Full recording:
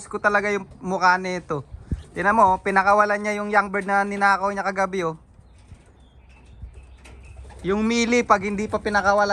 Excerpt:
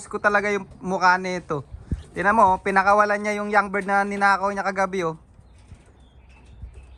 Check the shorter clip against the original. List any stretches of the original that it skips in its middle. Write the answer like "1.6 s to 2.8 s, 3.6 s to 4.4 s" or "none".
none